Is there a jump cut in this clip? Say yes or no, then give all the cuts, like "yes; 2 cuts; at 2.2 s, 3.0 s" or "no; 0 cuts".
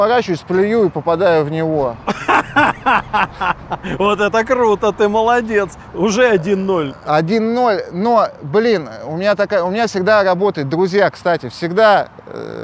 no; 0 cuts